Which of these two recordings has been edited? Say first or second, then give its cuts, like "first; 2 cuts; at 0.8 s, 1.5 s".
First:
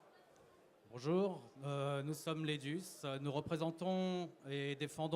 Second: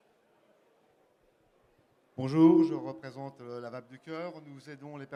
first; 1 cut; at 1.7 s